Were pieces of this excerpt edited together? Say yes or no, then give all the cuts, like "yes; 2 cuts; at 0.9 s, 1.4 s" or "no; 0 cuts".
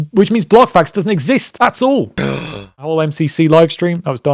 yes; 1 cut; at 2.8 s